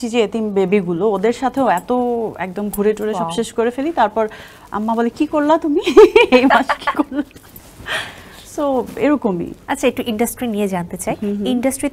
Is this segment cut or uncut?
uncut